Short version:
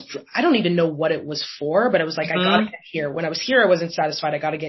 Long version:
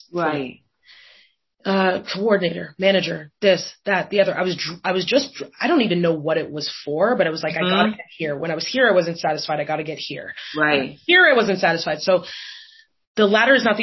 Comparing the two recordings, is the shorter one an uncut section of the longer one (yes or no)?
yes